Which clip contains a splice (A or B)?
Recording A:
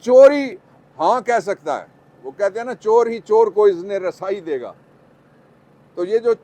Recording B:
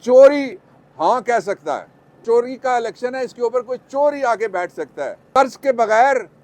B